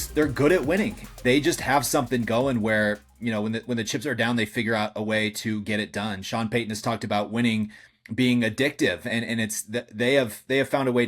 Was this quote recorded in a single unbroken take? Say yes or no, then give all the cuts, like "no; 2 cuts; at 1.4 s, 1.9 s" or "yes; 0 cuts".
no; 1 cut; at 1.0 s